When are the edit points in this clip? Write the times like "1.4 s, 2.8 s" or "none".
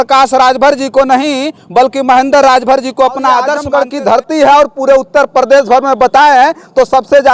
3.6 s